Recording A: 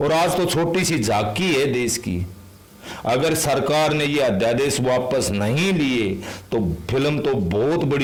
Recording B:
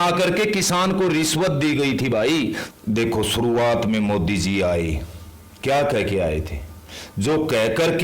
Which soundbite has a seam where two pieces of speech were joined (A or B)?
B